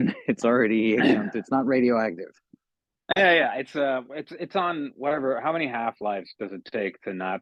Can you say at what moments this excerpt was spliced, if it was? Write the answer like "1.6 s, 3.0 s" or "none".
none